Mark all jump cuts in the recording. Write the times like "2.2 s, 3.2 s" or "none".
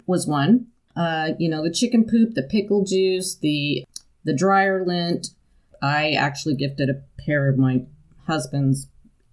0.9 s, 3.8 s, 5.7 s